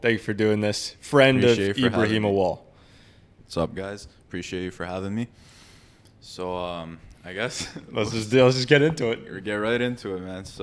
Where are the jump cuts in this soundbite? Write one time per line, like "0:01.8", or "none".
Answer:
none